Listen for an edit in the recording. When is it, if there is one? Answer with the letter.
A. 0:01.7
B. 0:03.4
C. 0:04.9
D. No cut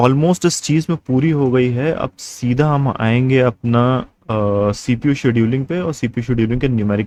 D